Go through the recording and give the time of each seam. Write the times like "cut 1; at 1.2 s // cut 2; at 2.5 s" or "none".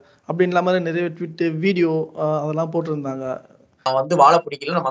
cut 1; at 3.9 s